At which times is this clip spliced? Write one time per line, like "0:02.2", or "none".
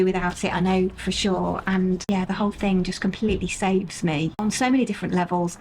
0:04.3